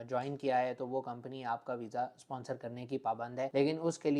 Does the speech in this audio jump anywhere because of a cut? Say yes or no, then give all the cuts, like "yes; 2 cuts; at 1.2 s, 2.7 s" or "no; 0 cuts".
no; 0 cuts